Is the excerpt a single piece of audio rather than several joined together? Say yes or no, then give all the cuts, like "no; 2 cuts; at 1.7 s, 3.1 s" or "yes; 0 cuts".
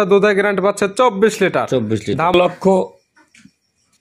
no; 1 cut; at 2.3 s